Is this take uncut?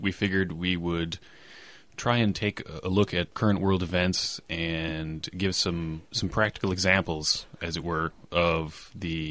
no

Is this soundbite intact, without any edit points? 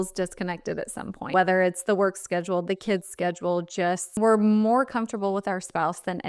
no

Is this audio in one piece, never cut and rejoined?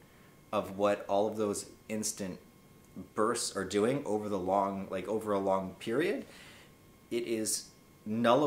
yes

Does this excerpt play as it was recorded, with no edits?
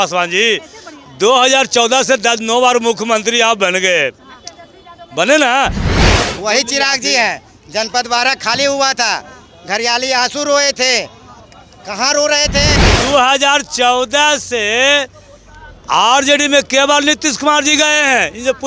no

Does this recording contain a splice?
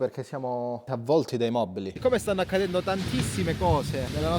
yes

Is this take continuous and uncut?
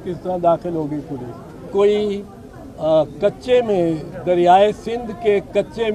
no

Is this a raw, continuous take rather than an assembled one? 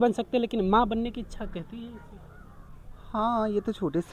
yes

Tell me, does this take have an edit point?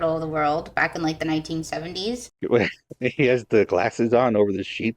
yes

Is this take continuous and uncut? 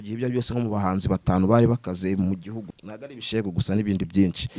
no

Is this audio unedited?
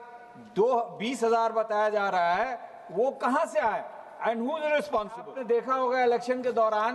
no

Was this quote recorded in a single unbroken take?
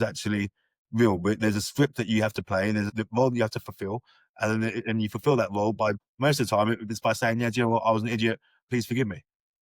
no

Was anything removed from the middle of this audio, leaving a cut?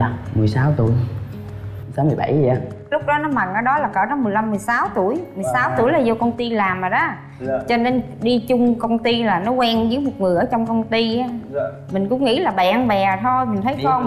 no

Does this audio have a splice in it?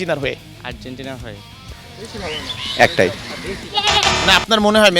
yes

